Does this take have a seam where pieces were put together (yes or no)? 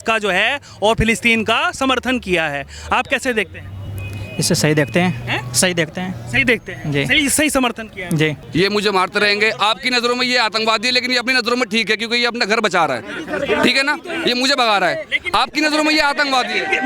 yes